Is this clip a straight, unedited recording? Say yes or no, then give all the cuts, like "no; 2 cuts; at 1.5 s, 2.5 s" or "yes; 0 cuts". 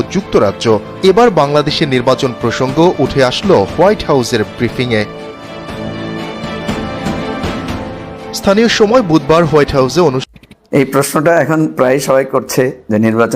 no; 1 cut; at 10.3 s